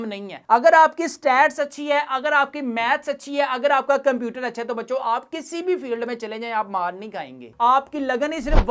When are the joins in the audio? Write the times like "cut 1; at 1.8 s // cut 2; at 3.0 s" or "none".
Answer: cut 1; at 7.5 s